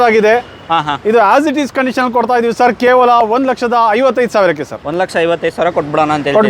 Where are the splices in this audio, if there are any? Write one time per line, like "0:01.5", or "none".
none